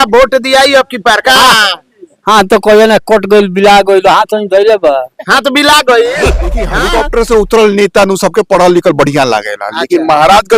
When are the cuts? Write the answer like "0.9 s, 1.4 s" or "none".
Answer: 6.8 s